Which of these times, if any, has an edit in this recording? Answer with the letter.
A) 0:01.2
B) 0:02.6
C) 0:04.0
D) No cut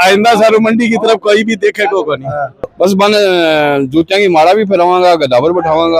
B